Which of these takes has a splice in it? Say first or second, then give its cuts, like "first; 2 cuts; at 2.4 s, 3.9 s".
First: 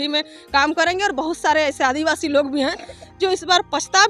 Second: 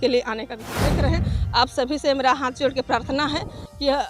second; 1 cut; at 1.0 s